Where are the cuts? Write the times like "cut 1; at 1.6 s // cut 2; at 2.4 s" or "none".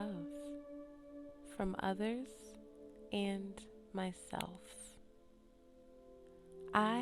none